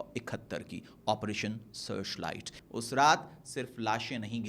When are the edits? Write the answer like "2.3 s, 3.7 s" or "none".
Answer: 2.5 s